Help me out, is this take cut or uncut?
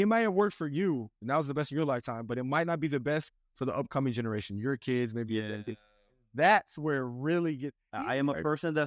cut